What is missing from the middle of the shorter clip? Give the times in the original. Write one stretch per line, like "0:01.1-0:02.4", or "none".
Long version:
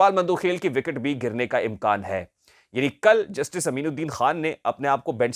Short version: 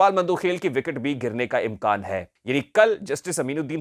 0:02.3-0:02.6